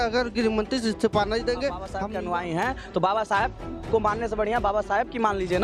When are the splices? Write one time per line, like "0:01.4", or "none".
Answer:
0:02.0